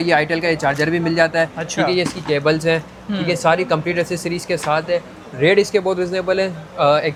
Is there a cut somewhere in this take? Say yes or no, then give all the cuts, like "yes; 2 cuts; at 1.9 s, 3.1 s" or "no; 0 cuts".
no; 0 cuts